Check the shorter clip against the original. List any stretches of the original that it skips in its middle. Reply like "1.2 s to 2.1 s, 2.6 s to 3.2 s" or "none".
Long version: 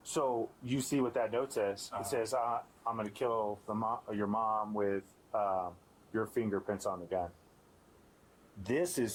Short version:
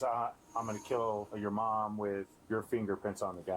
3.6 s to 4.1 s, 5.1 s to 6.0 s